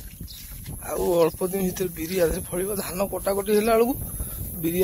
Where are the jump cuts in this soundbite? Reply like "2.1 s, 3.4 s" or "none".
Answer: none